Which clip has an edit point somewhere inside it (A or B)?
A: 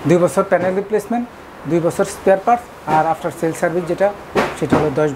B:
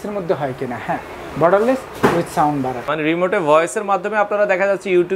B